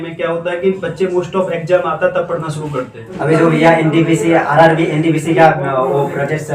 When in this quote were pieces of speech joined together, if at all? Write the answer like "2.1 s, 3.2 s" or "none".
3.0 s

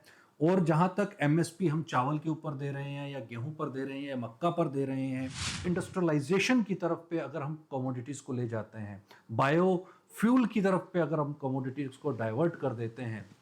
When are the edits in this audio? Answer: 5.7 s

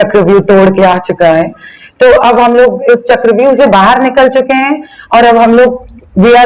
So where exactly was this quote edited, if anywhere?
none

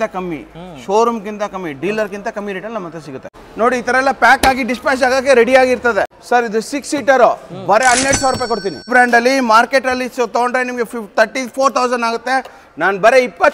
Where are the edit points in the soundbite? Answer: 3.4 s, 6.2 s, 8.9 s

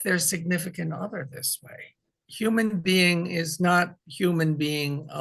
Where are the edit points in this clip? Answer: 2.2 s

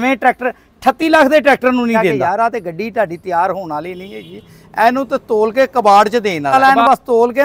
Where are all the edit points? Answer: 2.1 s, 6.5 s

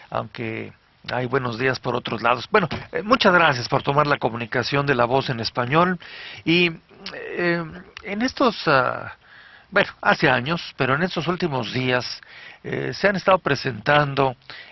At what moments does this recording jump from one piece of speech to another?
3.5 s

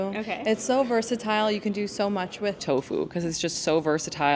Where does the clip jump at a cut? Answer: 2.6 s

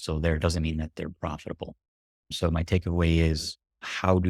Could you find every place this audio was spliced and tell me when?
none

